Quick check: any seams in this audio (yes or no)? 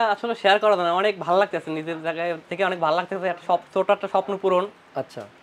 no